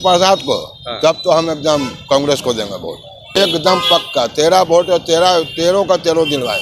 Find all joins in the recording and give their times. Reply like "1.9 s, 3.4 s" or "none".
3.4 s